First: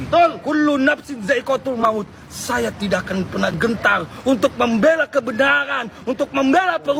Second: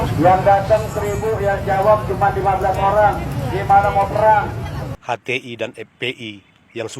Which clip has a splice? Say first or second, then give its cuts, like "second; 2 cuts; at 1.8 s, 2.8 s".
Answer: second; 1 cut; at 5.0 s